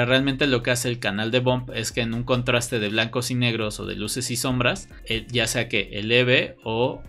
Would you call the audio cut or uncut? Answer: uncut